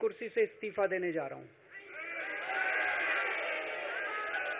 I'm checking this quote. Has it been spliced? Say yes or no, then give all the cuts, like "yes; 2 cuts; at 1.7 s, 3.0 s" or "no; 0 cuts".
no; 0 cuts